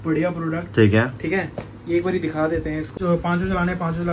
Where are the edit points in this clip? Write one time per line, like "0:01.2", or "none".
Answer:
0:02.9